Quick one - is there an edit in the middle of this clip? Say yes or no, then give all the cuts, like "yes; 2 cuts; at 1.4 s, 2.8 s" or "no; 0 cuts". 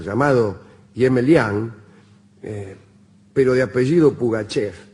yes; 1 cut; at 1.0 s